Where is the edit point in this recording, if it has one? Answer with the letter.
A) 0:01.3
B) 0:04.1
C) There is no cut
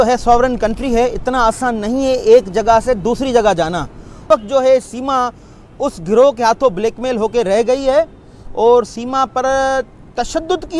B